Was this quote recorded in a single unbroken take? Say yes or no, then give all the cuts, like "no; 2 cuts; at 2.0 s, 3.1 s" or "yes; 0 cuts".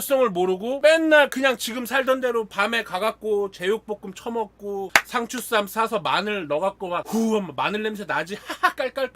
yes; 0 cuts